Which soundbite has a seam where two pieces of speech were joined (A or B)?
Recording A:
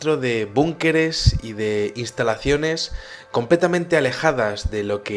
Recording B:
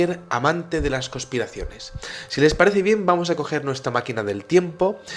B